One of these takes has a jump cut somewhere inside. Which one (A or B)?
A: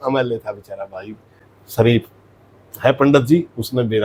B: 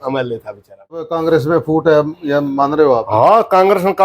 B